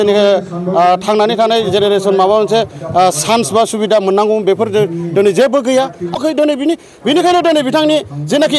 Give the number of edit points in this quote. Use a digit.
1